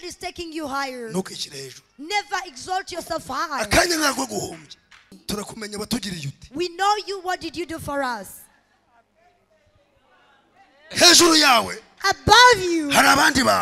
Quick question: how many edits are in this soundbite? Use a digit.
1